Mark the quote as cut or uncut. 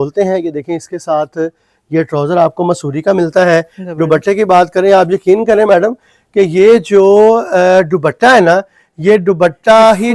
uncut